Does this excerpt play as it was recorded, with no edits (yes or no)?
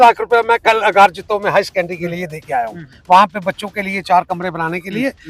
yes